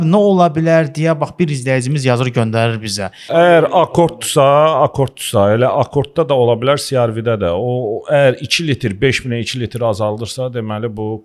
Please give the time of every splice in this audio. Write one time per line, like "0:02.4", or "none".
0:03.3